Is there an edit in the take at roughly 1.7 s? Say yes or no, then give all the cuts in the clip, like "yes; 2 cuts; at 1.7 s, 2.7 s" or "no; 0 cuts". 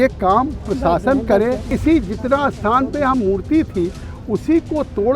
yes; 1 cut; at 1.7 s